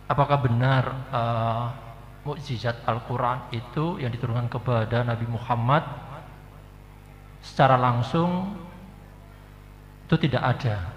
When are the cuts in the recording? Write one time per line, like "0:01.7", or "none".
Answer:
none